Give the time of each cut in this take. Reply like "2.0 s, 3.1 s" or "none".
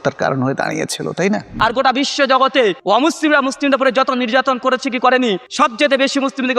1.5 s, 2.8 s, 5.5 s